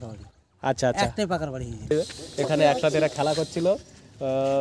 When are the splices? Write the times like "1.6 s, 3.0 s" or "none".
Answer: 1.9 s